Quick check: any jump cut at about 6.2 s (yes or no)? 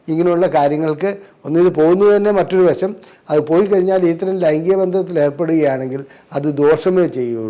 no